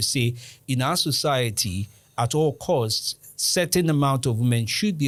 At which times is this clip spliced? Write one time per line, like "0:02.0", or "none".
none